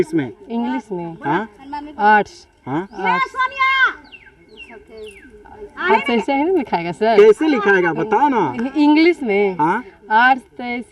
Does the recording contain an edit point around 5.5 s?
no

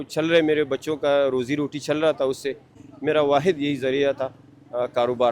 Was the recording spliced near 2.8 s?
yes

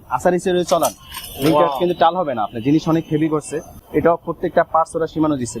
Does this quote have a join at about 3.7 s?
no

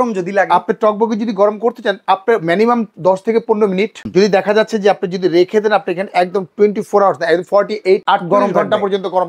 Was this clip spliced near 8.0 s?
yes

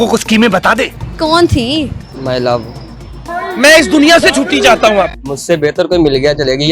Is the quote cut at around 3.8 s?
no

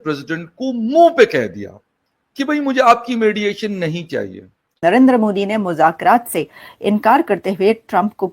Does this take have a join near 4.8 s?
yes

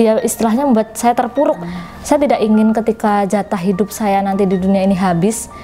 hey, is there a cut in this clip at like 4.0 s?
no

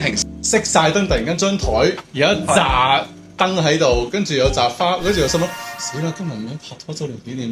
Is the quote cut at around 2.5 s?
no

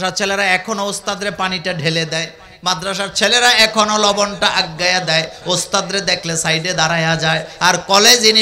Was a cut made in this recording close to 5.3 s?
no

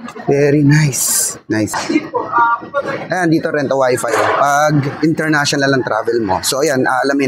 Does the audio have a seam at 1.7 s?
yes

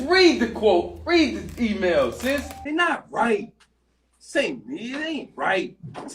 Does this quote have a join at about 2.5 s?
yes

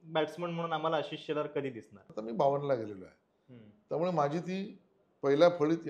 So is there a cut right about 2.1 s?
yes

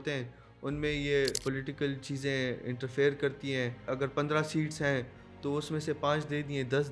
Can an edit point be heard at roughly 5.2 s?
no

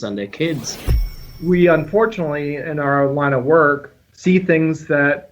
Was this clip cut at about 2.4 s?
no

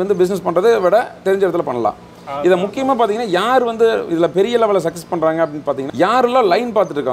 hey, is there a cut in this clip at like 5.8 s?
yes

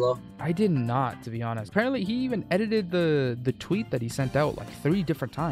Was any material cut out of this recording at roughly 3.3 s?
no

